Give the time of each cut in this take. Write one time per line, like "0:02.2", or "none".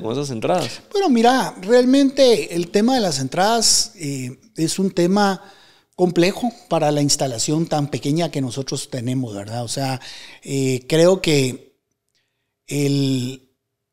none